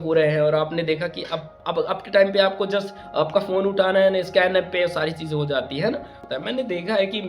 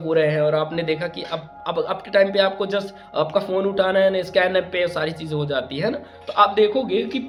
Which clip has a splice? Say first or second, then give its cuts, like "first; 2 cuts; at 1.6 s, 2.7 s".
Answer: first; 1 cut; at 6.2 s